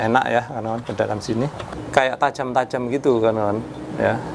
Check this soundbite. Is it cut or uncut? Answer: cut